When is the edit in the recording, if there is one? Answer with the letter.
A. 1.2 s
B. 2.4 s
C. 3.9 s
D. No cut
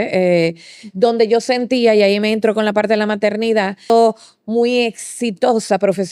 C